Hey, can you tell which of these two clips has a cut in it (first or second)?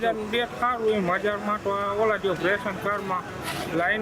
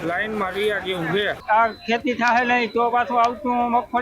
second